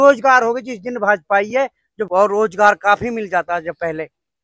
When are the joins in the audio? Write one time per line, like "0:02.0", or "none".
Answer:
0:02.1